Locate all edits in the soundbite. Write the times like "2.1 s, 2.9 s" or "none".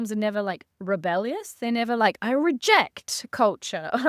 none